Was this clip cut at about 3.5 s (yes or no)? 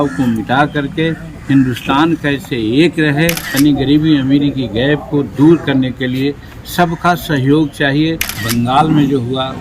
yes